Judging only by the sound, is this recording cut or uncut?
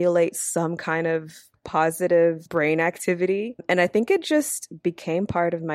cut